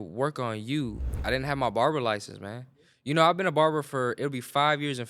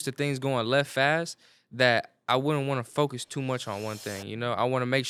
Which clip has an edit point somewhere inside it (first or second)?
first